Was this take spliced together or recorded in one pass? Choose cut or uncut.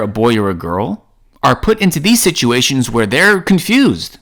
uncut